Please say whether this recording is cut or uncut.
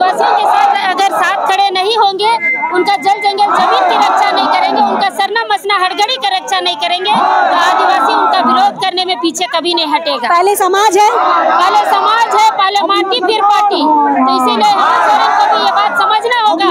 uncut